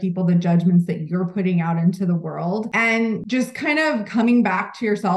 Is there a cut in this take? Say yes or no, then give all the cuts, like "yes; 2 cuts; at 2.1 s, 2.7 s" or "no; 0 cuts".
yes; 1 cut; at 3.1 s